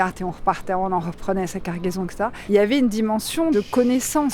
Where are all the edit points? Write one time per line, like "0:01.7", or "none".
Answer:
0:02.4
0:03.5